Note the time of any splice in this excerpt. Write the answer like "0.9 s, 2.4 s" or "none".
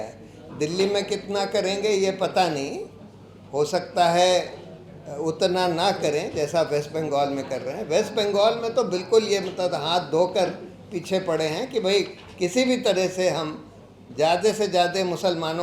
none